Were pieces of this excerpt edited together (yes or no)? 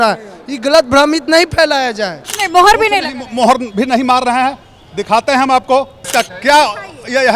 yes